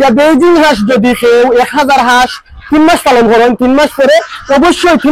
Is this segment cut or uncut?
uncut